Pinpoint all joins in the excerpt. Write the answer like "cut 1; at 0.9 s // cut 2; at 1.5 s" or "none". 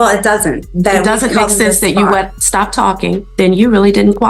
cut 1; at 3.2 s